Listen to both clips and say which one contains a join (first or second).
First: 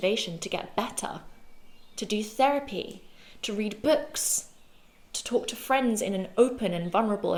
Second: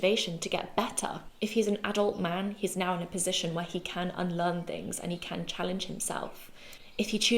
second